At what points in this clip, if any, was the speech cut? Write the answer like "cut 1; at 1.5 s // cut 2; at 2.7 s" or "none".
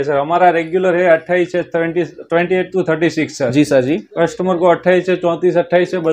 none